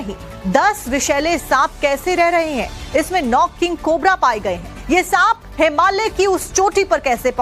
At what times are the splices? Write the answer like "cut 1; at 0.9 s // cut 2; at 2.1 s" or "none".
cut 1; at 2.5 s